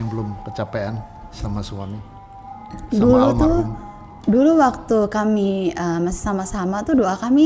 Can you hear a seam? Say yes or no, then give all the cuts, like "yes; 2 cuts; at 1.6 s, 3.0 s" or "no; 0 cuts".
no; 0 cuts